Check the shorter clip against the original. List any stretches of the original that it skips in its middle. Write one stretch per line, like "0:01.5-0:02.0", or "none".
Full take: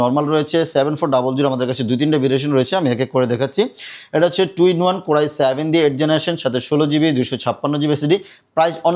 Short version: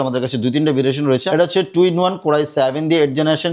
0:02.7-0:04.1